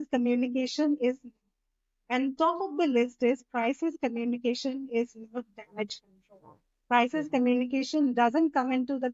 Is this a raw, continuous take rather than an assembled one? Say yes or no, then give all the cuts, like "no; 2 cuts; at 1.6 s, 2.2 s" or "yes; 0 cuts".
yes; 0 cuts